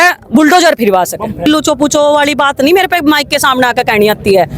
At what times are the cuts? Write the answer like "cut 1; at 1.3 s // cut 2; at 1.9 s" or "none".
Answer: cut 1; at 1.4 s